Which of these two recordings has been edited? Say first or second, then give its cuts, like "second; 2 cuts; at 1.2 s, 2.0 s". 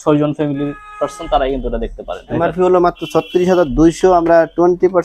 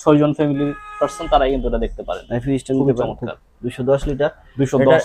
first; 1 cut; at 2.4 s